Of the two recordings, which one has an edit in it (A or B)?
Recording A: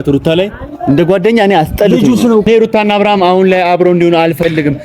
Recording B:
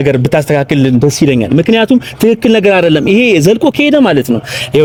A